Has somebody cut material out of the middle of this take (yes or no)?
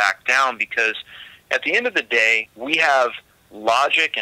yes